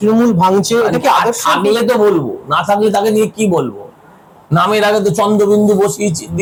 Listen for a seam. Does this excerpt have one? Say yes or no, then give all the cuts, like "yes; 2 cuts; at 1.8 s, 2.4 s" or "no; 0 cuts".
no; 0 cuts